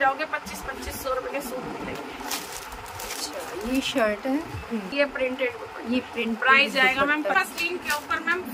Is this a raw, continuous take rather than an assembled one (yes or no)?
no